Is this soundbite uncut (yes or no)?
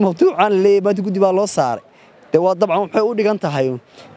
yes